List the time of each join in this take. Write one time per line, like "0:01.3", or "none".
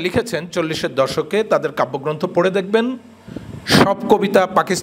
none